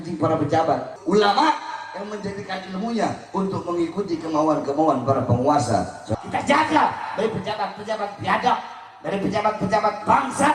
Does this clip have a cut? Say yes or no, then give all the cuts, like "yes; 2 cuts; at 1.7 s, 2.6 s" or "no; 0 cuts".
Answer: yes; 2 cuts; at 0.9 s, 6.1 s